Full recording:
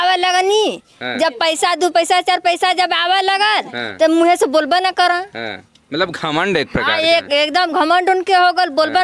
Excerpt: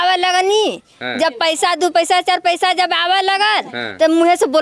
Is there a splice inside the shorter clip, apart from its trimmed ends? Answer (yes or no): no